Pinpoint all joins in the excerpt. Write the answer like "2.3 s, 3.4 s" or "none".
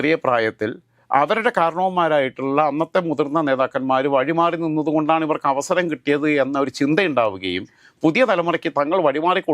none